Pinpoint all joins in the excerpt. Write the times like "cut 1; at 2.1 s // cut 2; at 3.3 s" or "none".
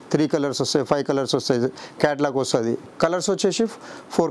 cut 1; at 2.9 s